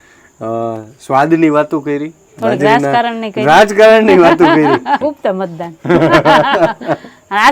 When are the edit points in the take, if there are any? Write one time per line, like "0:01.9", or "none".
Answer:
0:05.0